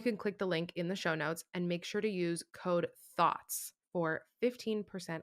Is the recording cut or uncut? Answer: cut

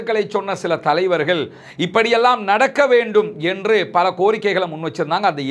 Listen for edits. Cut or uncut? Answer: uncut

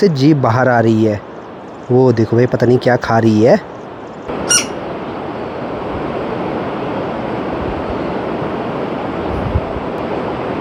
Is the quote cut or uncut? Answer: uncut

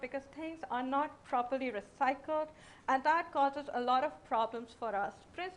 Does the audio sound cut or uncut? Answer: uncut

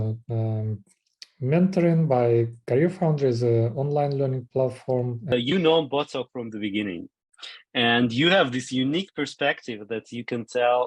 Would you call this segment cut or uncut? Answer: cut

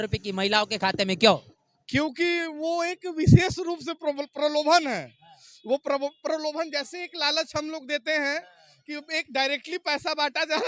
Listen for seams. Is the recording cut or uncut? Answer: uncut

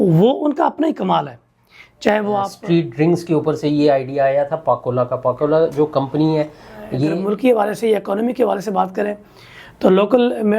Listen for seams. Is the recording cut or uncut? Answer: cut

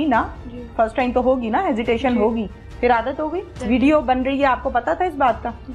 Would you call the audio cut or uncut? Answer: cut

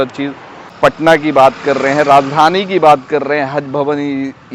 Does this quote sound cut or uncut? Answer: cut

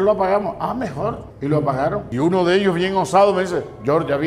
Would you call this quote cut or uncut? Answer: cut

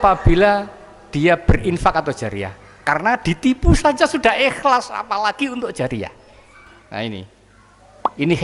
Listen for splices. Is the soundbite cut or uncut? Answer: uncut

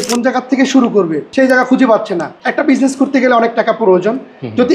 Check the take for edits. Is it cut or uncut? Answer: cut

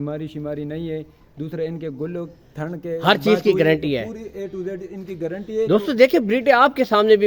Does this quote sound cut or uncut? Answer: uncut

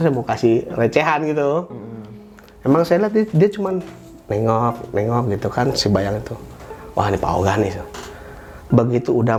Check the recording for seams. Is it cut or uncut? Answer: uncut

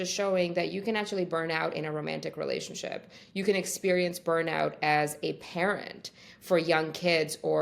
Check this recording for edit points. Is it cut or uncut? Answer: uncut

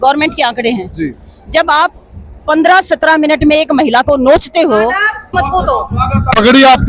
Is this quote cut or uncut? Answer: cut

